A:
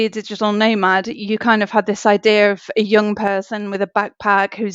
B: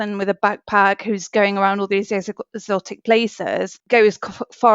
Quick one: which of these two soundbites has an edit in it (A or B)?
B